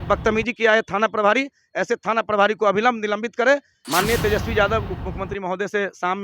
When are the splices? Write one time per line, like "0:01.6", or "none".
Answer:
0:03.8